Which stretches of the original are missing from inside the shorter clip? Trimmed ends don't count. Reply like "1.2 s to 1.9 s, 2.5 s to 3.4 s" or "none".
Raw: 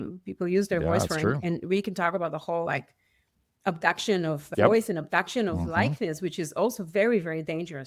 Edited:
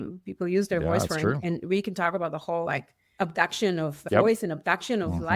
3.0 s to 3.4 s